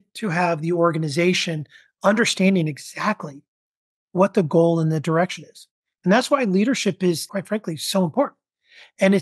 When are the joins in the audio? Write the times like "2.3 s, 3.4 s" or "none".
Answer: 7.2 s